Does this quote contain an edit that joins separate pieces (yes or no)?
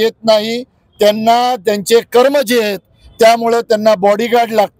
no